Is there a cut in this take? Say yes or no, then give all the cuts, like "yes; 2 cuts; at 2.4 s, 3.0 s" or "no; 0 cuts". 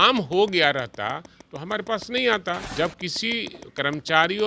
yes; 1 cut; at 2.7 s